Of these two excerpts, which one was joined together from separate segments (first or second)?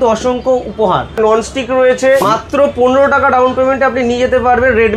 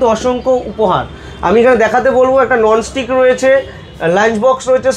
first